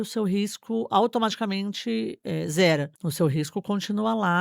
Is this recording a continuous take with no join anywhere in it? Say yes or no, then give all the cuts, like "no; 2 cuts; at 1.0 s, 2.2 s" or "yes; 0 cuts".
no; 1 cut; at 3.0 s